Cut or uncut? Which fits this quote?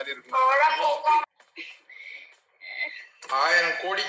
cut